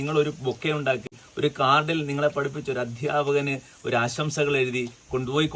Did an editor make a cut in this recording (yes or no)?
yes